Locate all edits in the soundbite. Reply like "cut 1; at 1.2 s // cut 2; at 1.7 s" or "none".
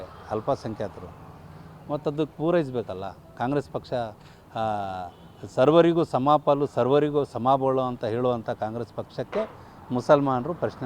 none